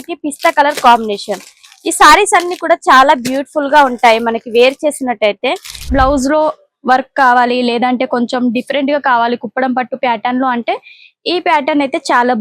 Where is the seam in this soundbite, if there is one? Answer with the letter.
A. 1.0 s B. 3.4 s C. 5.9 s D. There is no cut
C